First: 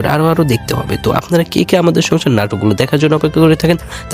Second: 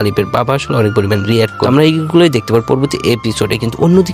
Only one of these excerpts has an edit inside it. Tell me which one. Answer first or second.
second